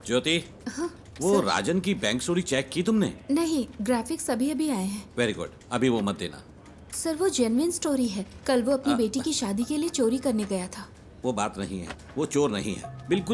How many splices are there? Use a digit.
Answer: 0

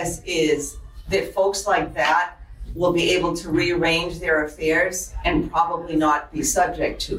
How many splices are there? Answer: 0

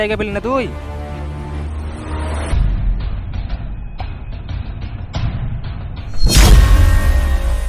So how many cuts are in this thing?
0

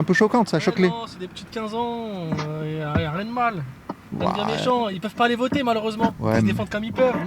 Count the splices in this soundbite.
1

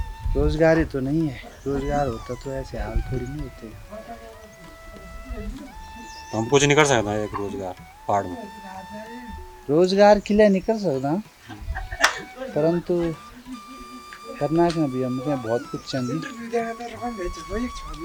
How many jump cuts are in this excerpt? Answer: 0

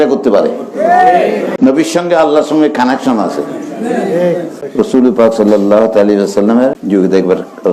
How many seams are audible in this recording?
3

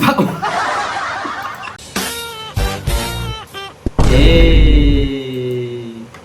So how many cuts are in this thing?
1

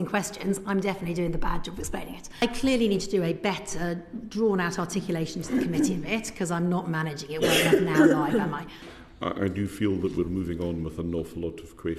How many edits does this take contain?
2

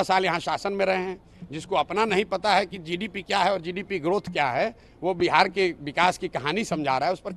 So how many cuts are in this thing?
0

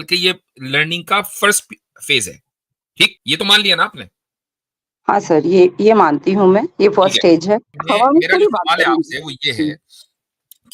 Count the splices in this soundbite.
2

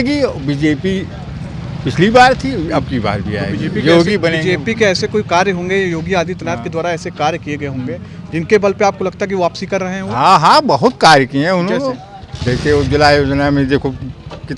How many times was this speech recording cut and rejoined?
0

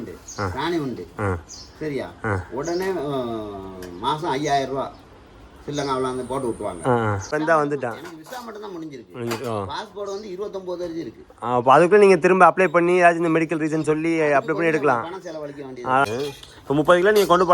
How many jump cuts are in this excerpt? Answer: 2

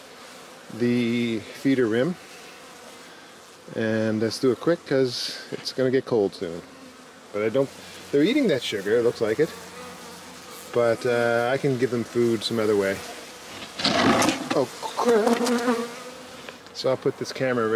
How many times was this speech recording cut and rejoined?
0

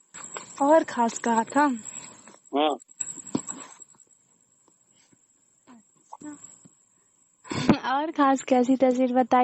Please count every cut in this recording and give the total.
0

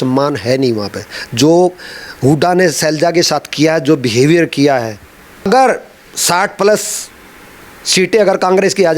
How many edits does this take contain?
1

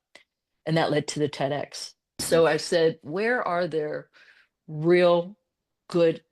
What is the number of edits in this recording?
1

